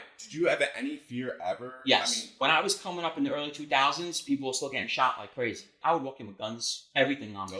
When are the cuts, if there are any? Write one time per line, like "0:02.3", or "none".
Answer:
0:05.7